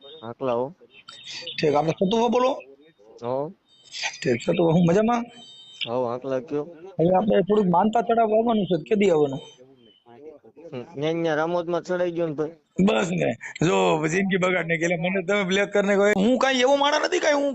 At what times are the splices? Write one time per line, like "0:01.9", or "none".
0:16.1